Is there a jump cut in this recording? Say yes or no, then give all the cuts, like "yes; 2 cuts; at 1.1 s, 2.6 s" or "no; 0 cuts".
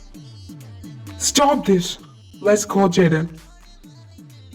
yes; 1 cut; at 3.6 s